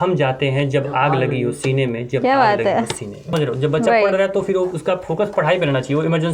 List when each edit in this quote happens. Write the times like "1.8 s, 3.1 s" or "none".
3.3 s